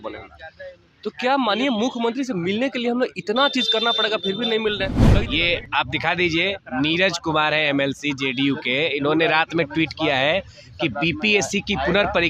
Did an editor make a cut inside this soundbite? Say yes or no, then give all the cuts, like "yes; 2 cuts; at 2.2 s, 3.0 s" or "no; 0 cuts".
yes; 1 cut; at 5.1 s